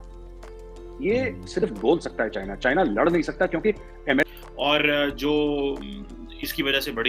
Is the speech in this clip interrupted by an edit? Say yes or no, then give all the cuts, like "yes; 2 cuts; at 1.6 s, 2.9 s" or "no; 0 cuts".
yes; 1 cut; at 4.3 s